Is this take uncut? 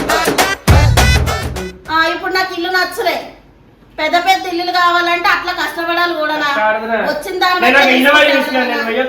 no; 1 cut; at 1.4 s

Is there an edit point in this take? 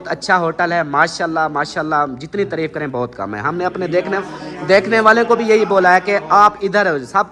no; 0 cuts

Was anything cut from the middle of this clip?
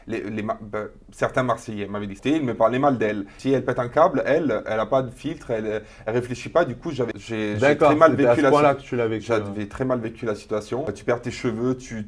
yes; 4 cuts; at 2.2 s, 3.3 s, 7.2 s, 10.9 s

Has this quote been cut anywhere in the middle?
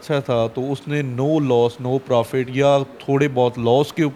no; 0 cuts

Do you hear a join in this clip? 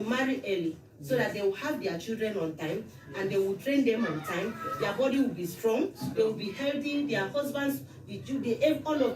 yes; 1 cut; at 4.6 s

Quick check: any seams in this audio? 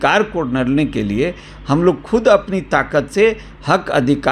no; 0 cuts

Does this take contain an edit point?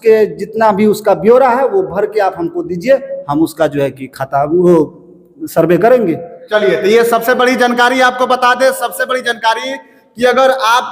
no; 0 cuts

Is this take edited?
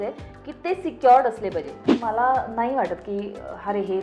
yes; 1 cut; at 2.0 s

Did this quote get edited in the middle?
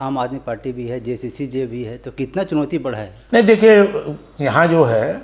no; 0 cuts

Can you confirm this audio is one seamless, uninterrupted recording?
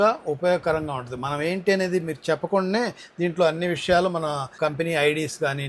no; 1 cut; at 4.5 s

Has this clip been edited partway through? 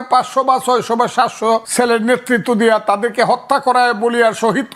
yes; 1 cut; at 1.7 s

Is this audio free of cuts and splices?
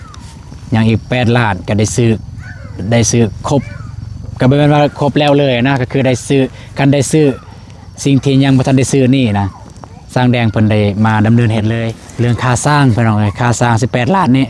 no; 1 cut; at 12.0 s

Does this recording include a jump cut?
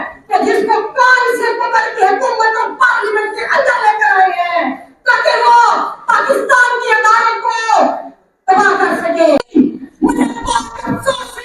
yes; 1 cut; at 9.5 s

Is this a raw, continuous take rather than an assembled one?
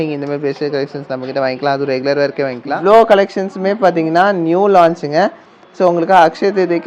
no; 1 cut; at 2.6 s

